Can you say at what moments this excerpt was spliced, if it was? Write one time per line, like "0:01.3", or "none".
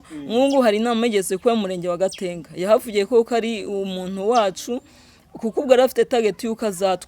none